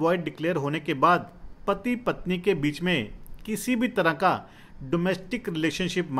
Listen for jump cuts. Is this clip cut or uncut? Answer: uncut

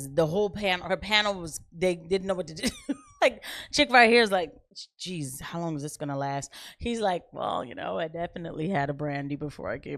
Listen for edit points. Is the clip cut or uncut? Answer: uncut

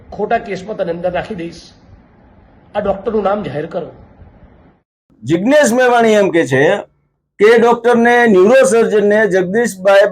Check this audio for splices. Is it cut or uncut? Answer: cut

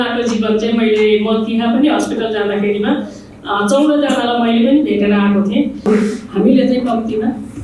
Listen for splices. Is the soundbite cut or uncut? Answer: cut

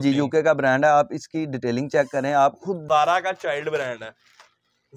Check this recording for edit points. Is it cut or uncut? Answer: cut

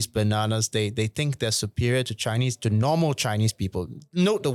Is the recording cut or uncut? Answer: uncut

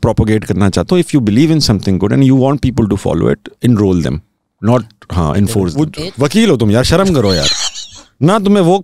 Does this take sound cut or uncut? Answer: cut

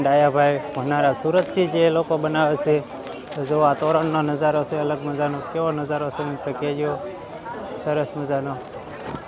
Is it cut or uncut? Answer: uncut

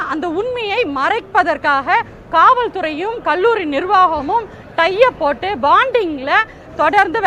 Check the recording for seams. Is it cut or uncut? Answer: uncut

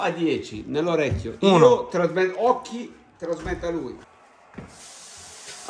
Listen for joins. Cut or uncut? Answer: cut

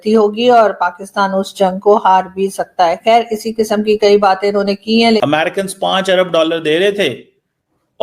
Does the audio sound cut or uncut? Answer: cut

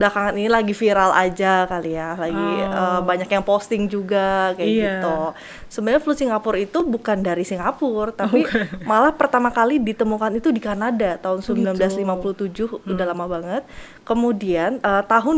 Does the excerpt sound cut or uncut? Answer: uncut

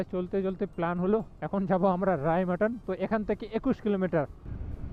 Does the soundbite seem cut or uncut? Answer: uncut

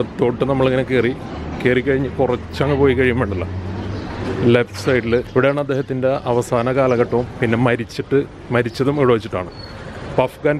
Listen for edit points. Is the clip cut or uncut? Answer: cut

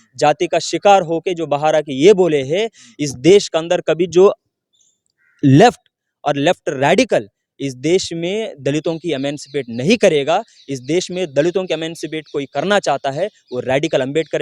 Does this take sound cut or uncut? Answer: uncut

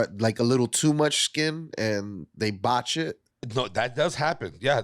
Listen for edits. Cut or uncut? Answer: cut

